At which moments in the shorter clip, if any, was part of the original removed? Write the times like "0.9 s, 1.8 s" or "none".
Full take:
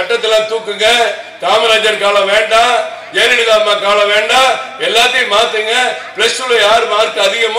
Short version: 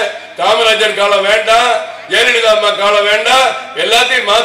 none